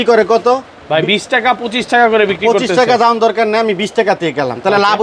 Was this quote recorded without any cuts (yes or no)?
yes